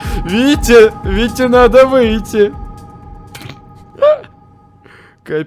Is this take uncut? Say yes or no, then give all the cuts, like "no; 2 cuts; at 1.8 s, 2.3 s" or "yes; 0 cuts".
yes; 0 cuts